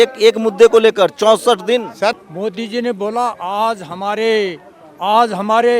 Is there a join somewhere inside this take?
yes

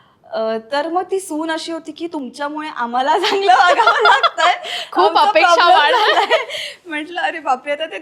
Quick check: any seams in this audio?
no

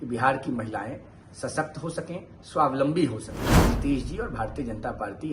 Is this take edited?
yes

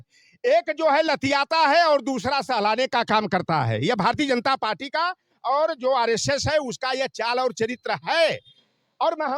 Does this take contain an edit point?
no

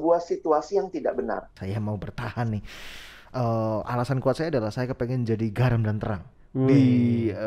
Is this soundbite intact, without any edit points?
no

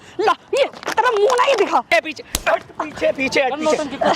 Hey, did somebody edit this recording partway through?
yes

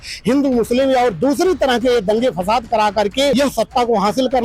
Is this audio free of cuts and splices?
no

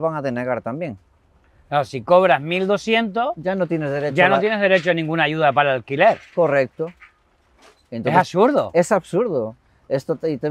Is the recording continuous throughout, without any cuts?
yes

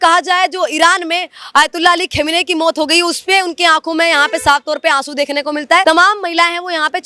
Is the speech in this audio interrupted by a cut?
yes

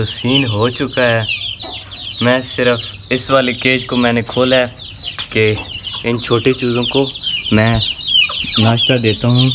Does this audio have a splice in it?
no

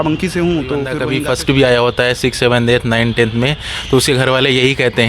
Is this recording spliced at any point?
yes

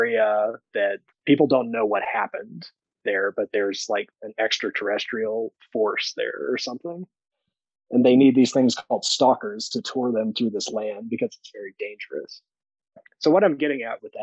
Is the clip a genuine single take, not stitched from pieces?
no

